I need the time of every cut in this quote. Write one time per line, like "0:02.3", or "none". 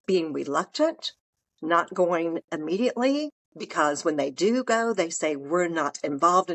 none